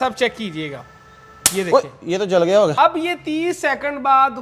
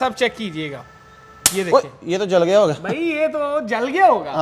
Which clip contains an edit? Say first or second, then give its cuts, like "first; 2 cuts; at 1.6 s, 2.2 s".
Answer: first; 1 cut; at 2.7 s